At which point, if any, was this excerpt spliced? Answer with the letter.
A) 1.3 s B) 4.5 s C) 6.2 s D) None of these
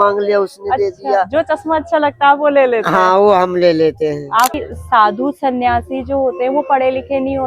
B